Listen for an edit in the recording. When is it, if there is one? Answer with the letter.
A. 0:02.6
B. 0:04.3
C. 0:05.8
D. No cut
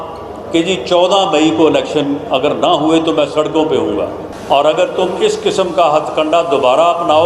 B